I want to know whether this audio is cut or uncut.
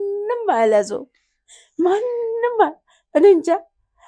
uncut